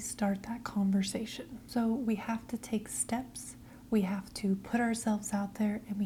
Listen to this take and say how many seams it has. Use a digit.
0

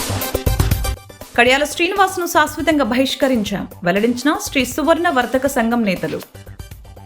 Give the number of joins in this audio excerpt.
0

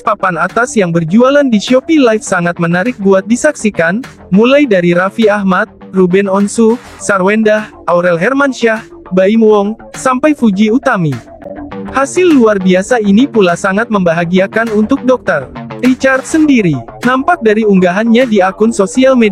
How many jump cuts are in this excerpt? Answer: 1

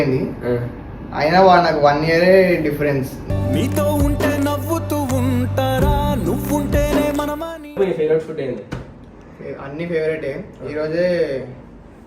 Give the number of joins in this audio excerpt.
1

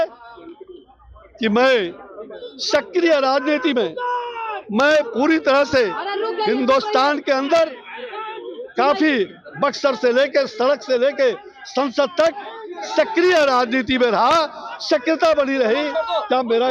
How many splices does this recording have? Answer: 0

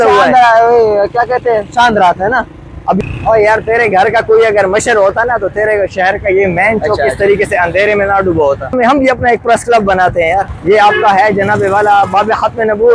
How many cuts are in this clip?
3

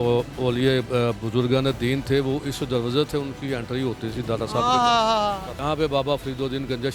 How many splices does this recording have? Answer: 1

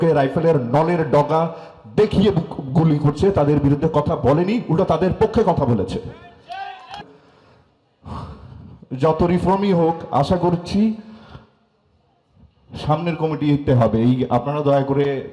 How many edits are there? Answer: 1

